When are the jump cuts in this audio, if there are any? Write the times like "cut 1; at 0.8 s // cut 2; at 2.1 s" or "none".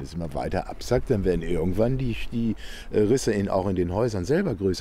none